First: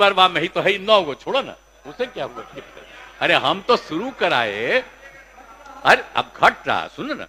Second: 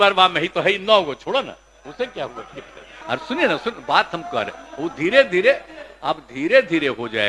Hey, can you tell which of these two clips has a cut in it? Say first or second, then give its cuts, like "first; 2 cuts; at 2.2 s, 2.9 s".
second; 1 cut; at 2.9 s